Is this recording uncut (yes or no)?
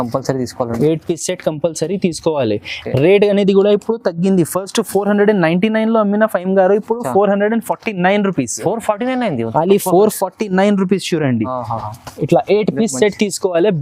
yes